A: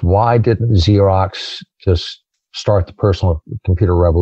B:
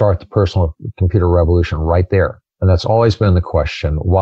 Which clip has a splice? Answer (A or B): B